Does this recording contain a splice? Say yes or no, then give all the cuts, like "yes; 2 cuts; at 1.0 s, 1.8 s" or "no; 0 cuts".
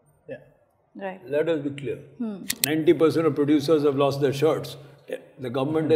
yes; 1 cut; at 2.6 s